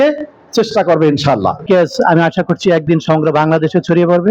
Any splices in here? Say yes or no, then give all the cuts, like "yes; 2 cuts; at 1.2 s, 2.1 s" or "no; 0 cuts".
yes; 1 cut; at 1.6 s